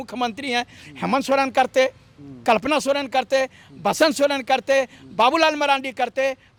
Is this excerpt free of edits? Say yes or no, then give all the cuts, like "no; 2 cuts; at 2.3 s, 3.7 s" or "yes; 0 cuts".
yes; 0 cuts